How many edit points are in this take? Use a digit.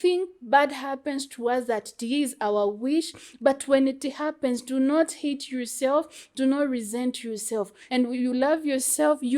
1